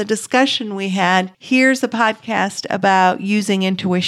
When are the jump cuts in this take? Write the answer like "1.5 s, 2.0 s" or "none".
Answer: 1.4 s